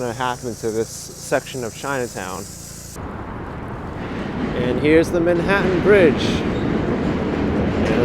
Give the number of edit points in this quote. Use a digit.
1